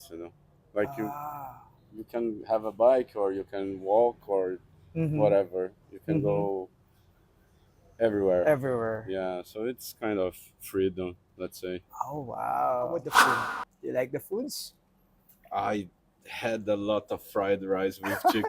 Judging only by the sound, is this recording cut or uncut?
cut